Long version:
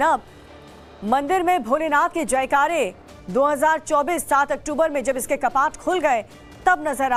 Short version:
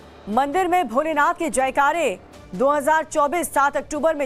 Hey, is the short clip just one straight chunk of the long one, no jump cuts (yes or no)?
yes